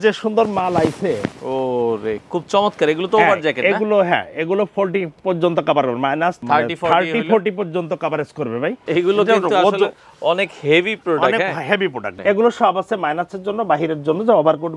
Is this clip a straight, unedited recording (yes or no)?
no